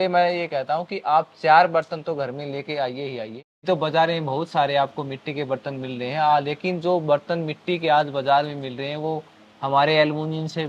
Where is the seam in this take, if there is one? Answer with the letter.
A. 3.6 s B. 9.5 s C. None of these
A